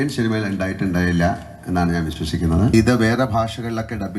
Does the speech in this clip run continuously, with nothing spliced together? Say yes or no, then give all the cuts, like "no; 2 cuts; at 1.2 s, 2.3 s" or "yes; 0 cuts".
no; 1 cut; at 2.7 s